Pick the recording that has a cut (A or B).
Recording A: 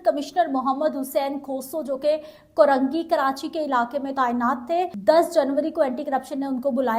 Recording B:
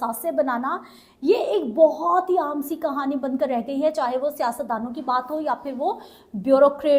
A